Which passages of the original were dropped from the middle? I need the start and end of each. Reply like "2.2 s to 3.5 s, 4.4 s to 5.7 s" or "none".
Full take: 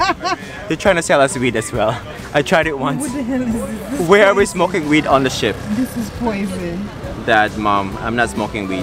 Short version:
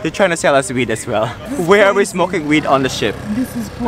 2.1 s to 3.8 s